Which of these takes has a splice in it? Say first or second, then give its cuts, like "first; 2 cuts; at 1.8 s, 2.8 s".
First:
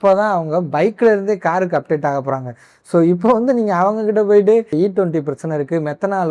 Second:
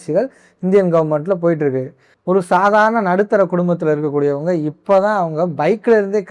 second; 1 cut; at 2.1 s